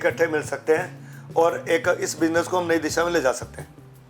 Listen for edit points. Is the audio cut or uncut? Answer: uncut